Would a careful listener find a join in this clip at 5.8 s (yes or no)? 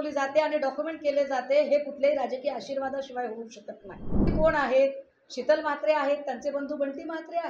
no